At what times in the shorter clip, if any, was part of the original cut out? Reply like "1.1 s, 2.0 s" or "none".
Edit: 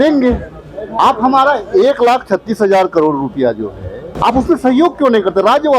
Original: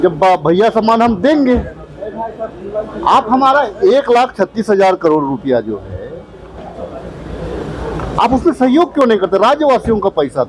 0.9 s, 4.1 s